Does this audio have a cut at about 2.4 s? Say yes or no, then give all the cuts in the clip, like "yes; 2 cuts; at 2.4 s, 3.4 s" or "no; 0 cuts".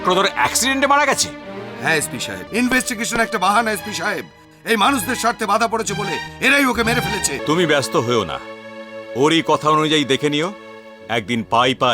yes; 2 cuts; at 2.4 s, 7.4 s